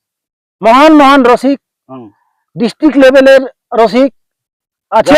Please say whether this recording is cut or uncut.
uncut